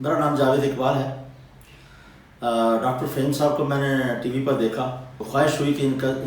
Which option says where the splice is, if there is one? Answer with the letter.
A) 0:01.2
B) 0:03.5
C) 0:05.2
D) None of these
C